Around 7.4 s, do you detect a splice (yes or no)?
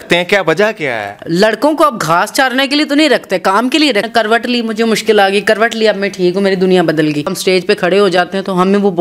yes